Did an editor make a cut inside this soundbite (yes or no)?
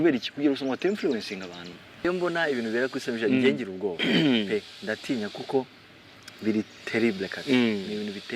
yes